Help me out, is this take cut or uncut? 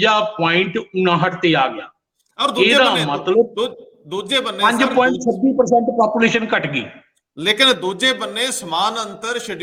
uncut